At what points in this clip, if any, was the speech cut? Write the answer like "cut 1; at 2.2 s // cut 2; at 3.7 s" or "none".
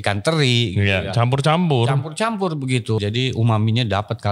cut 1; at 3.0 s